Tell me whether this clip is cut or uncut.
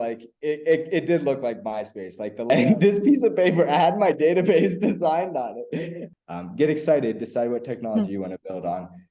cut